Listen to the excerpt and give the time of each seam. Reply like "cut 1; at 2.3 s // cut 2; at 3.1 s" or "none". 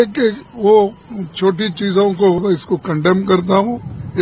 cut 1; at 2.4 s